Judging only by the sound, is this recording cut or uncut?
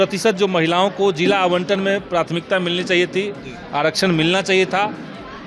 uncut